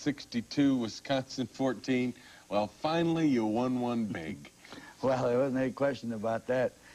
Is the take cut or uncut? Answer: cut